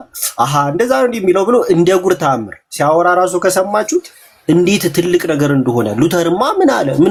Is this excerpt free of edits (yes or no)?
yes